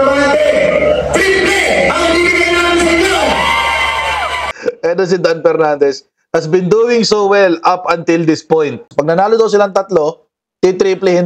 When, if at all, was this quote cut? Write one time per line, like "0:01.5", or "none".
0:04.4
0:08.9